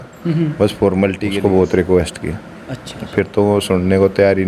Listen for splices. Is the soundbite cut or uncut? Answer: cut